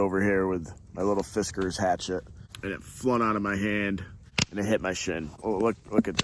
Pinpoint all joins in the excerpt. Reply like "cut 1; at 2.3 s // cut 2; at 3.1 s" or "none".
cut 1; at 2.5 s // cut 2; at 4.3 s // cut 3; at 5.3 s